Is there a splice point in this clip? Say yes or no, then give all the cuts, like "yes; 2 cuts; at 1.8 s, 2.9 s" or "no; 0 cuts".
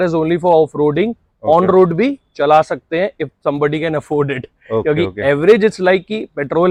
no; 0 cuts